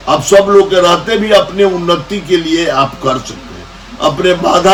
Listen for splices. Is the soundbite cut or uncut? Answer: uncut